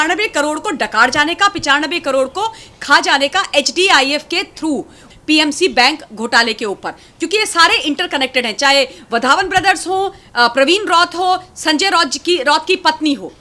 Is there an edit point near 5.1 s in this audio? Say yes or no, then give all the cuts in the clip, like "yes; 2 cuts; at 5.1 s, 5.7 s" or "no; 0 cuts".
yes; 1 cut; at 5.1 s